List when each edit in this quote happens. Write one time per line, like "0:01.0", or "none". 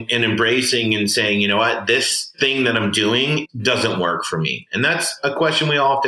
0:02.3
0:03.4